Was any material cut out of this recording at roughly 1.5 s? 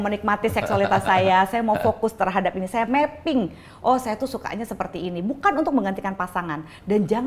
no; 0 cuts

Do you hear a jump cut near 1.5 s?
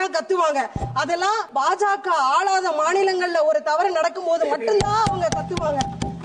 yes; 1 cut; at 1.5 s

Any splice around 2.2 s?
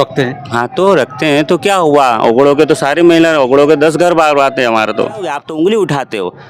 no; 1 cut; at 5.2 s

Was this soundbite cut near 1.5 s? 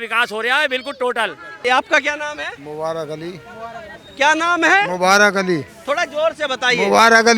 yes; 1 cut; at 1.5 s

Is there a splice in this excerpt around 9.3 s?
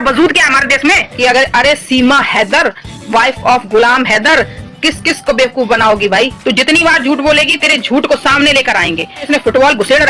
yes; 3 cuts; at 1.1 s, 6.4 s, 9.3 s

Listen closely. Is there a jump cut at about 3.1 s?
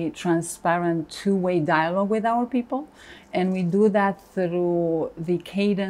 no; 0 cuts

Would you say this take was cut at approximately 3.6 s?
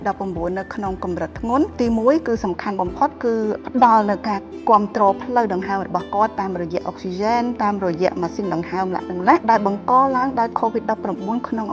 yes; 3 cuts; at 1.7 s, 3.6 s, 9.4 s

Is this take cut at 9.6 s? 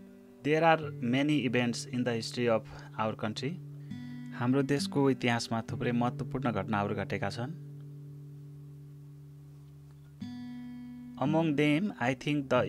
no; 2 cuts; at 7.5 s, 10.9 s

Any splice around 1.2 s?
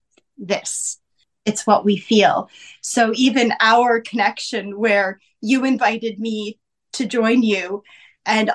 yes; 1 cut; at 1.2 s

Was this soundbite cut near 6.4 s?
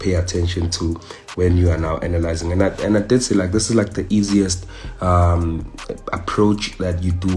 no; 0 cuts

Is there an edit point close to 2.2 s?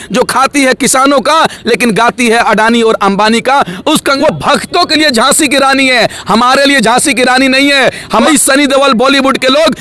no; 2 cuts; at 4.2 s, 8.2 s

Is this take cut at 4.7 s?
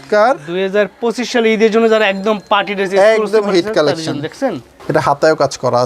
yes; 1 cut; at 4.7 s

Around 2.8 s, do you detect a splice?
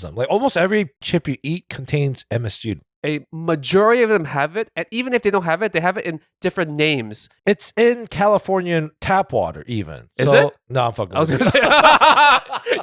yes; 2 cuts; at 1.0 s, 2.8 s

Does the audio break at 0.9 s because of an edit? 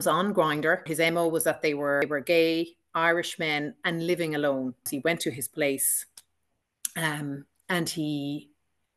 yes; 3 cuts; at 0.9 s, 2.0 s, 4.8 s

